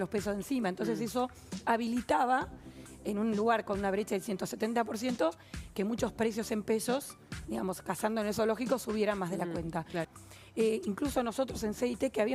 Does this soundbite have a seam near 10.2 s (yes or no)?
yes